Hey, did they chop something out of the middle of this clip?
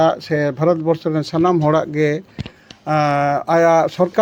no; 0 cuts

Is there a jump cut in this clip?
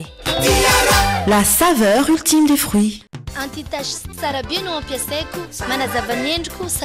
yes; 1 cut; at 3.0 s

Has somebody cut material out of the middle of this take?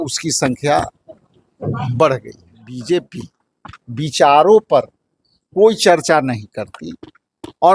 yes; 1 cut; at 2.7 s

